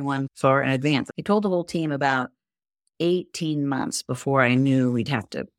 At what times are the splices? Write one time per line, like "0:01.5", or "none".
0:01.1

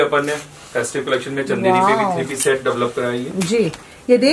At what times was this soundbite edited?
none

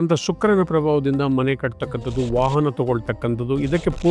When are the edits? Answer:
none

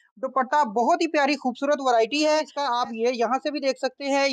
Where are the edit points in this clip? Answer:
0:02.6

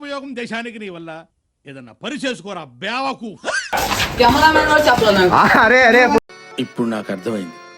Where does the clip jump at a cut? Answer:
0:03.7

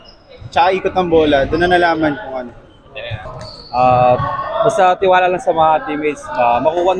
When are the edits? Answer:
0:03.3

